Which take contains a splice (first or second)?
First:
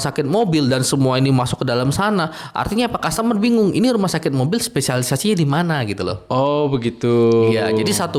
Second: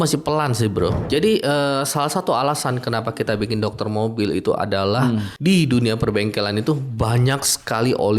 second